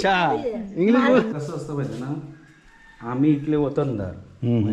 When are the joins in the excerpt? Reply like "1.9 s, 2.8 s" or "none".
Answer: 1.3 s